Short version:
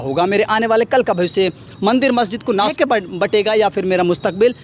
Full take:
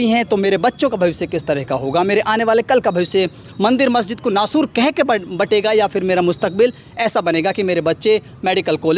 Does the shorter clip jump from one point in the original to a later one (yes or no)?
yes